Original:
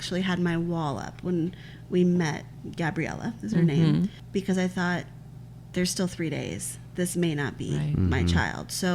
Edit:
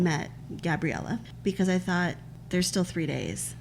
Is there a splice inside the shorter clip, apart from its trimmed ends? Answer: yes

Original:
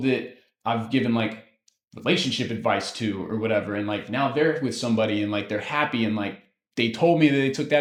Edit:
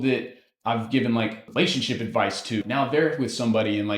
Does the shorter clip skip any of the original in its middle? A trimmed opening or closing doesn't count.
yes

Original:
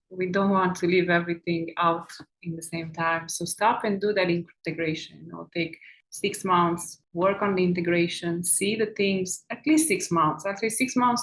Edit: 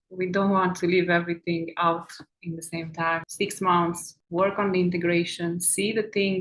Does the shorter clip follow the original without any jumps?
no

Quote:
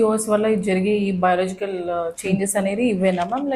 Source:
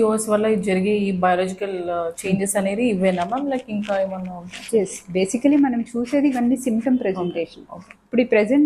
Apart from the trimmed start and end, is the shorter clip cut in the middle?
no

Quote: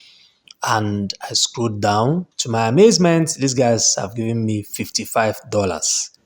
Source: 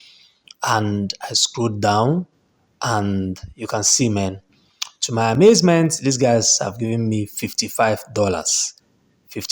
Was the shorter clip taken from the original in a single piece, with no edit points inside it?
no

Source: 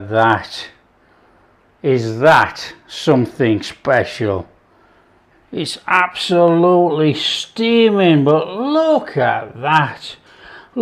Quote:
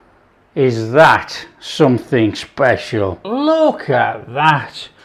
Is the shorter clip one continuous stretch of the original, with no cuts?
no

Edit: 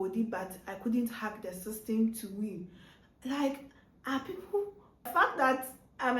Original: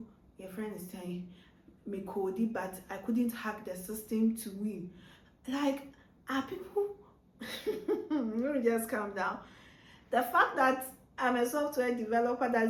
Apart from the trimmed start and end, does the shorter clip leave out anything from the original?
yes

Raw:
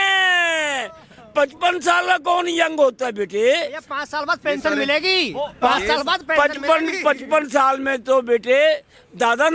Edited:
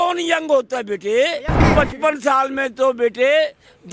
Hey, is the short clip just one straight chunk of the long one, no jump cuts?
no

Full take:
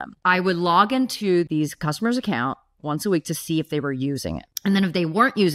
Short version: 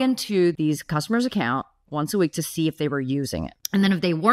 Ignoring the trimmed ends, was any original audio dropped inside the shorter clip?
no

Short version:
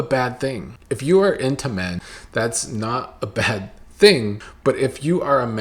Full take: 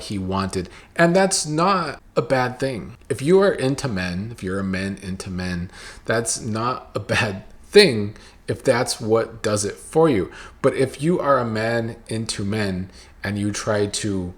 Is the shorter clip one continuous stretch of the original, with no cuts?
no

